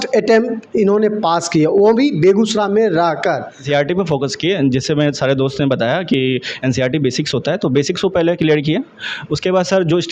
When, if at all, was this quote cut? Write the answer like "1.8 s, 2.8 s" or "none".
3.6 s